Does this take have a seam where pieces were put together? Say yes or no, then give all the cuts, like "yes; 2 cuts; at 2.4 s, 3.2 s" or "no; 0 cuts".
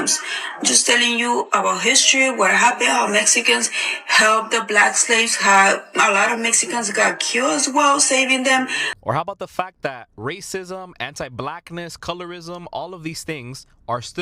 yes; 1 cut; at 9.0 s